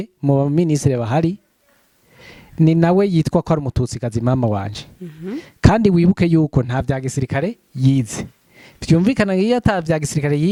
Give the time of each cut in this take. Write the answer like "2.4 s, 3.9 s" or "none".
none

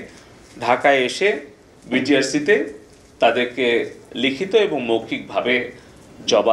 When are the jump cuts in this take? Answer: none

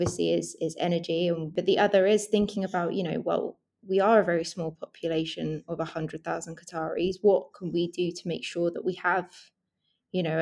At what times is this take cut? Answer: 1.5 s

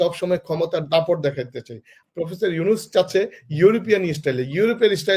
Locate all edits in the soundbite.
1.9 s

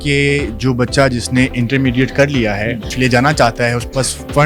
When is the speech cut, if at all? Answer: 2.9 s

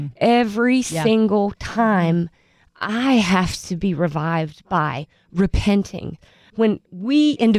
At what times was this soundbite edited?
6.4 s

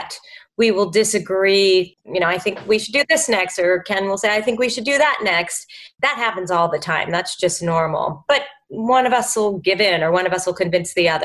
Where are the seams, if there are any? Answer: 2.0 s

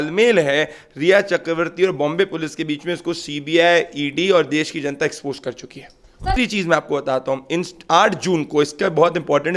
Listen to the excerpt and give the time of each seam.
6.3 s

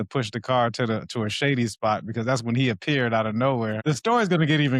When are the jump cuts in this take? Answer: 3.8 s

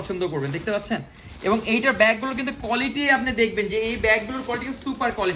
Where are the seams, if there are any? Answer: none

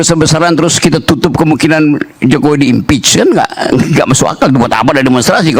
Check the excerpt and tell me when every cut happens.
none

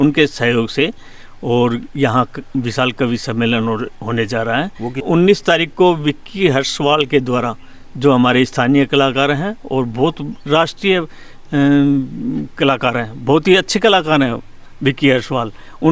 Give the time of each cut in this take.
5.0 s

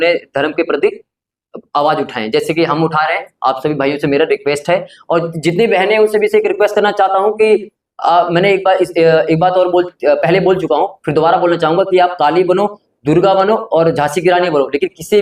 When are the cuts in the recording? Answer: none

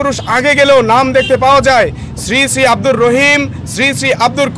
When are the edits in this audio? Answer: none

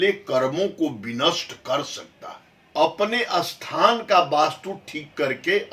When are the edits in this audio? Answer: 2.7 s

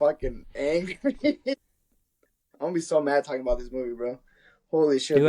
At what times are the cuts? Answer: 1.5 s

